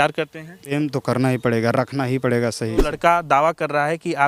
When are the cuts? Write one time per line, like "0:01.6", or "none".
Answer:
0:00.7
0:02.9